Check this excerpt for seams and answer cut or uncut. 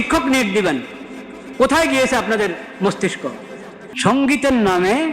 cut